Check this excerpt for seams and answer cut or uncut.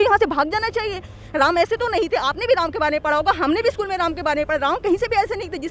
uncut